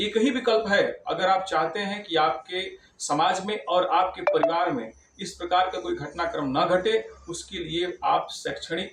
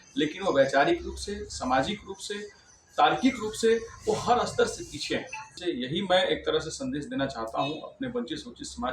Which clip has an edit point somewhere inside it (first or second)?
second